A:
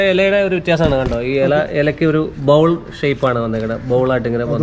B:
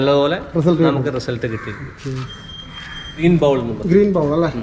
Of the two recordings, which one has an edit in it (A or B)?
B